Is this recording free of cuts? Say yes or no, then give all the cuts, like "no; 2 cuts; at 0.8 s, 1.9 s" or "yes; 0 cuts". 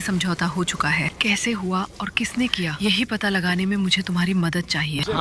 yes; 0 cuts